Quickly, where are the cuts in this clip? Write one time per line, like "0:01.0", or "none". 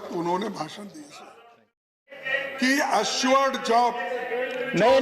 0:02.0